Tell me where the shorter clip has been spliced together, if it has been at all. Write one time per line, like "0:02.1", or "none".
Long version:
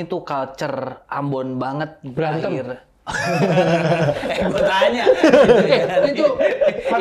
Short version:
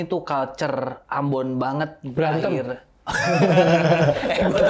none